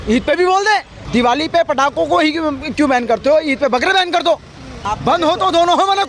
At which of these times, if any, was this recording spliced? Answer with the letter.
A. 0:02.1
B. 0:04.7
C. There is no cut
B